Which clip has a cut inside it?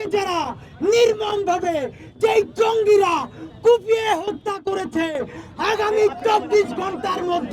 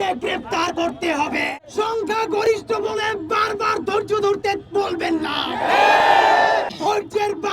second; 2 cuts; at 1.5 s, 6.7 s

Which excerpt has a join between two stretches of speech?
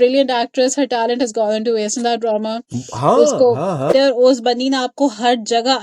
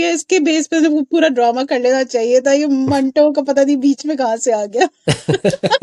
first; 1 cut; at 3.9 s

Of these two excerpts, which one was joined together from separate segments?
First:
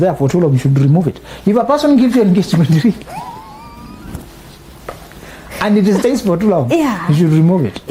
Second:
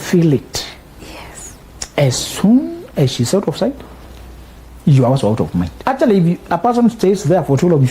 second; 1 cut; at 5.7 s

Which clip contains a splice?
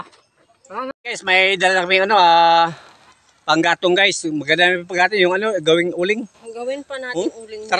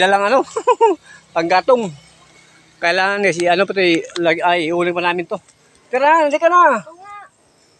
first; 1 cut; at 0.9 s

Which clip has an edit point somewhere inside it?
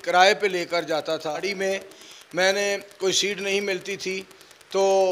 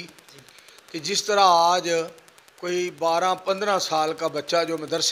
first; 1 cut; at 1.5 s

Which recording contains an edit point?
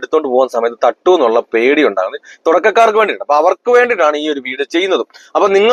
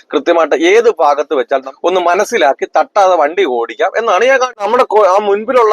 second; 2 cuts; at 1.7 s, 4.6 s

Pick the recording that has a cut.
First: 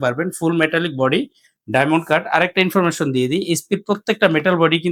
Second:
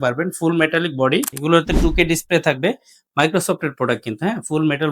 second; 1 cut; at 1.3 s

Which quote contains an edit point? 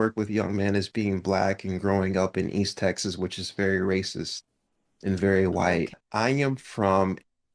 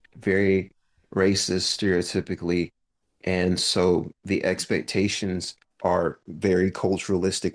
first; 1 cut; at 6.0 s

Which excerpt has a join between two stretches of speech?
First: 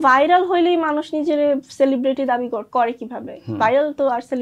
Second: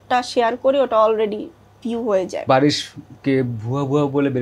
second; 1 cut; at 2.4 s

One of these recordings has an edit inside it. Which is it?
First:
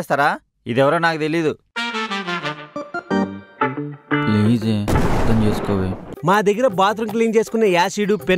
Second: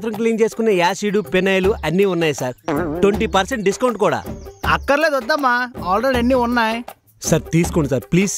first; 1 cut; at 6.0 s

